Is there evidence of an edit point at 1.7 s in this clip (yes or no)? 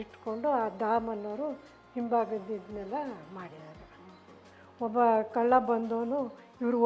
no